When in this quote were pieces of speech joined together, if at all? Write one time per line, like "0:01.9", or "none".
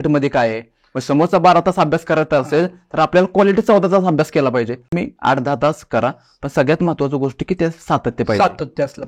0:04.9

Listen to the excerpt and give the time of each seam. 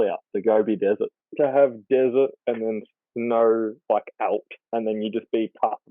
0:01.2
0:04.5

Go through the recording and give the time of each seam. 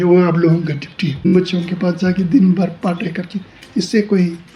0:01.2

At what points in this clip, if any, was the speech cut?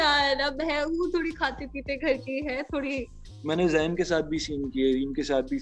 0:03.1

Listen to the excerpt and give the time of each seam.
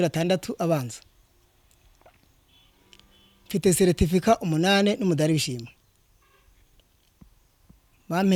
none

